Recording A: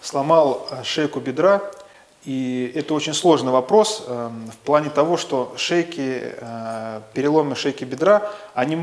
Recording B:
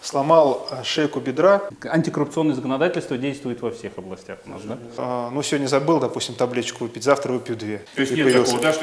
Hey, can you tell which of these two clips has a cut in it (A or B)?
B